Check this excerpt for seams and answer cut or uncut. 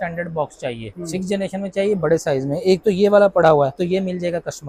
uncut